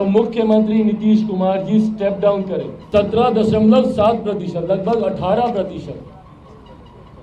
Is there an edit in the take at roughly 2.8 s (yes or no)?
yes